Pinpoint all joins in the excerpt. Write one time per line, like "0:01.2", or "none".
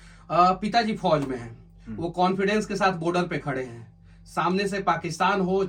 none